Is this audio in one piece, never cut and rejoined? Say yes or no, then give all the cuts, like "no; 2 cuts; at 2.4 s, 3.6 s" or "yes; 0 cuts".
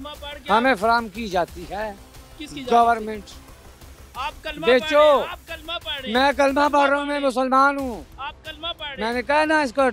yes; 0 cuts